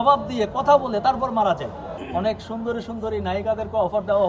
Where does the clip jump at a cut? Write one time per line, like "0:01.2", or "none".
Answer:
0:01.9